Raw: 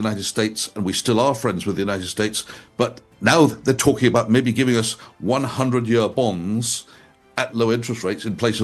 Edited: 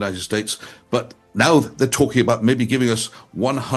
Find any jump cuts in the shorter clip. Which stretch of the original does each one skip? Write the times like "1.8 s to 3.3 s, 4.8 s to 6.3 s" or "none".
none